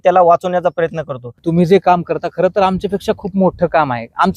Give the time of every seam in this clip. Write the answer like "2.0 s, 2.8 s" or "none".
1.4 s